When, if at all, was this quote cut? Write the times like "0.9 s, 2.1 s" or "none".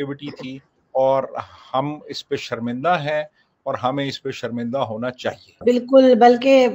5.6 s